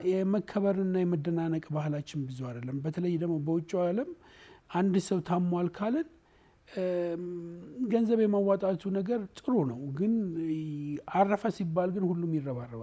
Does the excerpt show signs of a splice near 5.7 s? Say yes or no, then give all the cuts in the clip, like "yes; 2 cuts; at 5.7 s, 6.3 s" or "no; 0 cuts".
no; 0 cuts